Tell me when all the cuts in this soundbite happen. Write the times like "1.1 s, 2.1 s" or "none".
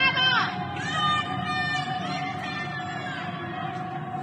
none